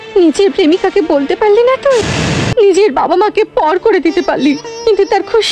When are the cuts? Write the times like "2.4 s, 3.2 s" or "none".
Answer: 2.5 s